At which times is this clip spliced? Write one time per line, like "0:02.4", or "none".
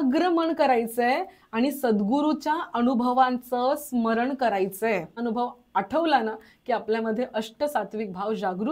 0:05.2